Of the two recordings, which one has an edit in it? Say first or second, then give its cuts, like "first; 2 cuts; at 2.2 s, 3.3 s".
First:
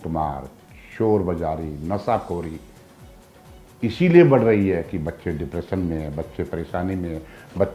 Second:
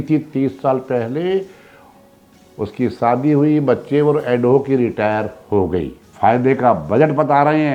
second; 1 cut; at 6.0 s